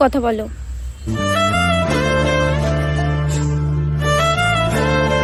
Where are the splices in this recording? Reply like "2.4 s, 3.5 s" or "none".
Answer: none